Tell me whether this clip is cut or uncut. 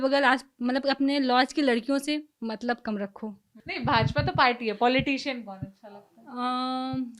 cut